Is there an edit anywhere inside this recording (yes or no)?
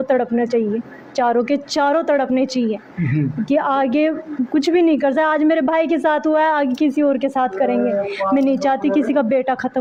no